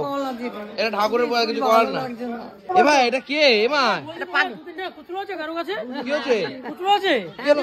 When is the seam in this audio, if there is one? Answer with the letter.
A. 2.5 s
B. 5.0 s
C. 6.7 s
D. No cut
A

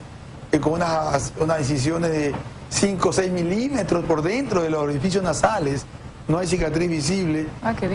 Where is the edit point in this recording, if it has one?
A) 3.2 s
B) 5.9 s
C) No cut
A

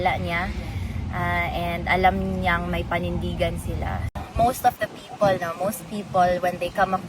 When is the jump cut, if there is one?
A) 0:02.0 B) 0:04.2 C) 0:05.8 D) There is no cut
B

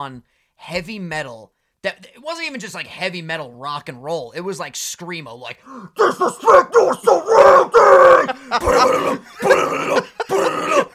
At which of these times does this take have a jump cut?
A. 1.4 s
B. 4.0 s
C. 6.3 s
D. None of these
D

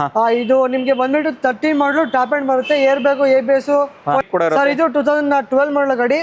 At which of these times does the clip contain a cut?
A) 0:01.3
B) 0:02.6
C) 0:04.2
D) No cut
C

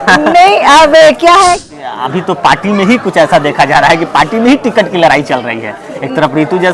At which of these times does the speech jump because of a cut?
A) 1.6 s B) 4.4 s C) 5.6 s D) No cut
A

